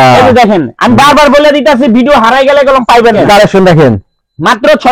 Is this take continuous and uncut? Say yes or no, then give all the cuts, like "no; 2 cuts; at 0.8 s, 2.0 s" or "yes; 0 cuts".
no; 1 cut; at 3.2 s